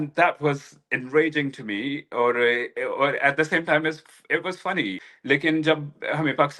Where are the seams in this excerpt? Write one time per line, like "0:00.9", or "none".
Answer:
0:05.1